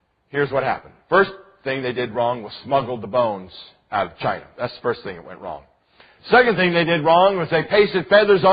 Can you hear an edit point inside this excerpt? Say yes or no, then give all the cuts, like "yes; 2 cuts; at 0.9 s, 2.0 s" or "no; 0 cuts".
yes; 1 cut; at 4.0 s